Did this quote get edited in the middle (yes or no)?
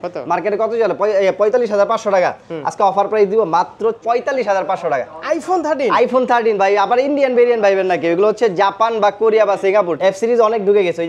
yes